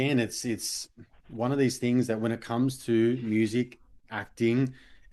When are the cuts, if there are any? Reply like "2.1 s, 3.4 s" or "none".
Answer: none